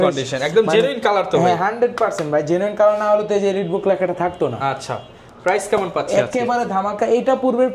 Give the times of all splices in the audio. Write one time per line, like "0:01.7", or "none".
none